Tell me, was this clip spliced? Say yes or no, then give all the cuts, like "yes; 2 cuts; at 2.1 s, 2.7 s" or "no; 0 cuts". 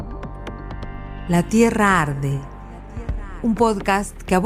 yes; 1 cut; at 1.2 s